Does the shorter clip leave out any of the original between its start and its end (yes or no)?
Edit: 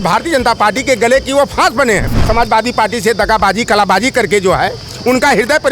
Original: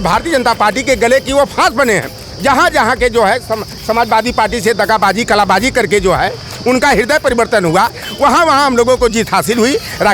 yes